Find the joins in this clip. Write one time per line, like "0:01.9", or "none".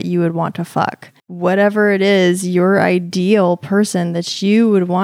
0:01.3